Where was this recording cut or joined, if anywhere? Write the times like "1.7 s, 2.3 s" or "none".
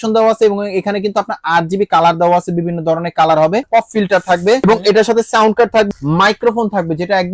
3.7 s, 4.6 s, 5.9 s